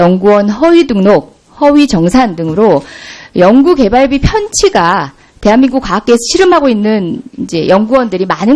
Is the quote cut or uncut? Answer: cut